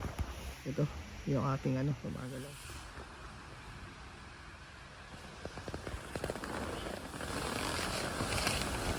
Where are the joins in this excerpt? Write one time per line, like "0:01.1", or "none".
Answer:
0:02.4
0:07.0